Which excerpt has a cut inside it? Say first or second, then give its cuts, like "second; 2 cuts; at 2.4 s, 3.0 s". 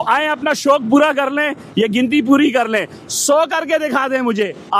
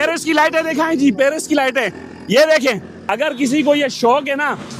second; 1 cut; at 3.0 s